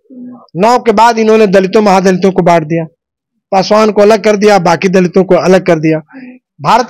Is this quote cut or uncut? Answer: uncut